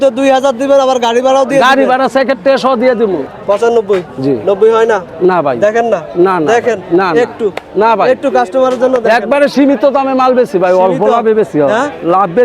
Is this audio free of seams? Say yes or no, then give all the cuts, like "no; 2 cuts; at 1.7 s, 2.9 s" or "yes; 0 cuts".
no; 1 cut; at 3.3 s